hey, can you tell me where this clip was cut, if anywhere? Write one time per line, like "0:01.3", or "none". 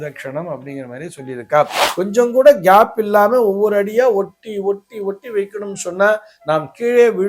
0:01.8